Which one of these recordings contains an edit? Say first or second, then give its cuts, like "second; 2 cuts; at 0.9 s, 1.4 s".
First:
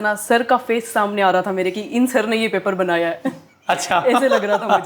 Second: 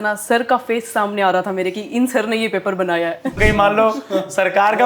second; 1 cut; at 3.4 s